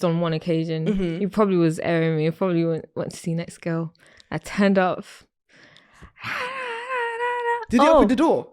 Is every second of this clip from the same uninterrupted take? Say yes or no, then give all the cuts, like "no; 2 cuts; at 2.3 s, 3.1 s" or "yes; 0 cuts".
yes; 0 cuts